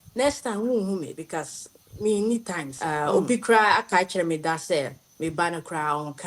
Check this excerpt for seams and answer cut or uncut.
cut